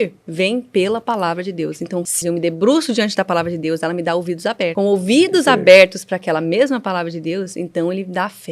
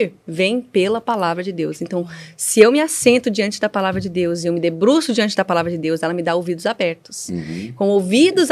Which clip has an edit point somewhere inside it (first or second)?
first